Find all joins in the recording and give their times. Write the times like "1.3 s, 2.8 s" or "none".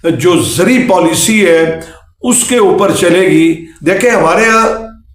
3.7 s